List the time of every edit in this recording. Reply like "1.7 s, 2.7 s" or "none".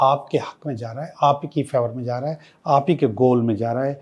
none

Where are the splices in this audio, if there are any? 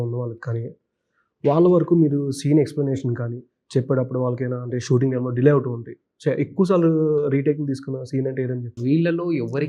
8.7 s

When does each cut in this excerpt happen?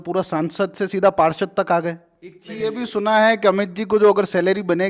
2.4 s

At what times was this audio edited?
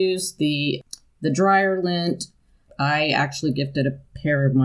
0.8 s, 2.7 s

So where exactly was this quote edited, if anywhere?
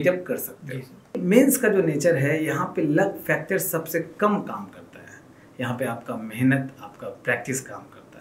1.2 s

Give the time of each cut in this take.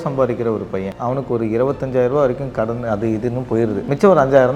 0.9 s, 3.8 s

